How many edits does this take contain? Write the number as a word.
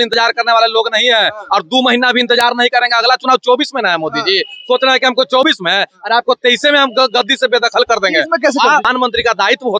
one